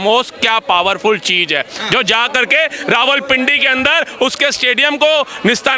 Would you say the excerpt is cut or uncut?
uncut